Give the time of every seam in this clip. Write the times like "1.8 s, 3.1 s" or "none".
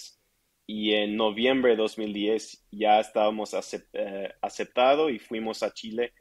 none